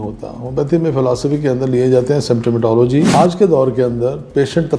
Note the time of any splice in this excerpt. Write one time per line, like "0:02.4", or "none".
0:03.1